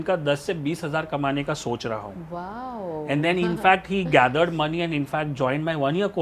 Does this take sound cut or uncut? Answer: uncut